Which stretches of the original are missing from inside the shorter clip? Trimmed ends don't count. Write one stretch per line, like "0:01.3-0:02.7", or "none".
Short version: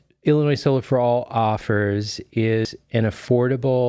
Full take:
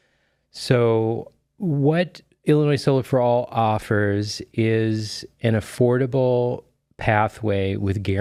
0:04.9-0:05.2